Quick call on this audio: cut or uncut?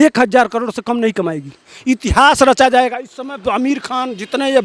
uncut